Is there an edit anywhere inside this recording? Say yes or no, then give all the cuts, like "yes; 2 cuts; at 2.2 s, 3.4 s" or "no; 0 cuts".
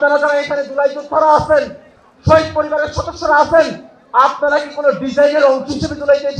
no; 0 cuts